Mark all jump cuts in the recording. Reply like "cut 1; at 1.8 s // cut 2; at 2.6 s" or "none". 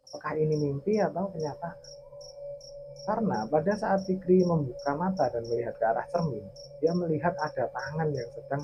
none